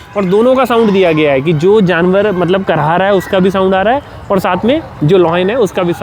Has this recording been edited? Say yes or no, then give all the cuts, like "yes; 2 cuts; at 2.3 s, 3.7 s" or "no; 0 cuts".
no; 0 cuts